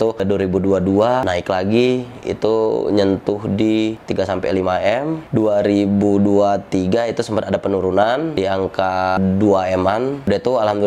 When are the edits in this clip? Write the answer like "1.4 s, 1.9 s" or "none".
none

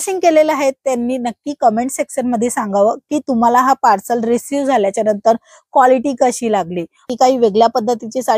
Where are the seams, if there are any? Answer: 7.0 s

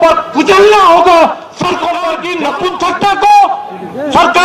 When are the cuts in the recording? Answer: 2.3 s

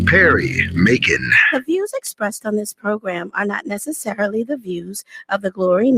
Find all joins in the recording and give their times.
1.3 s

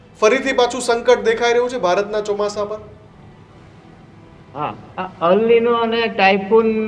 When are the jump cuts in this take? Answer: none

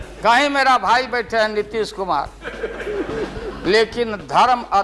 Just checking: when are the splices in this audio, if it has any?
none

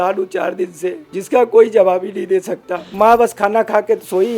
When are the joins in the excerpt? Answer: 1.1 s, 2.8 s

